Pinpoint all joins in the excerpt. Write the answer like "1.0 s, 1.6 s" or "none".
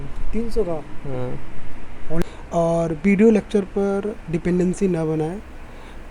2.2 s